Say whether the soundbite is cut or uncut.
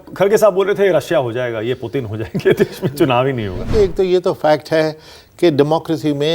cut